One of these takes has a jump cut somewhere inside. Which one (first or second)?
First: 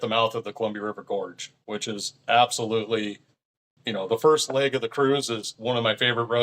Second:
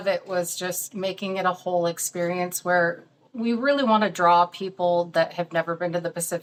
first